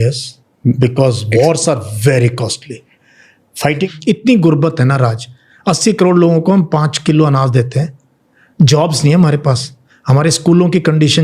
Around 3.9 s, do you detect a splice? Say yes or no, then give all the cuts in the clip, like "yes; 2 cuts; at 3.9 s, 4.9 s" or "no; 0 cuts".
yes; 1 cut; at 3.9 s